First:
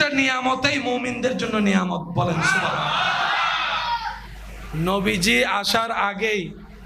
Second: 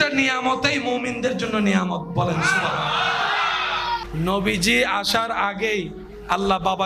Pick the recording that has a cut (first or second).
second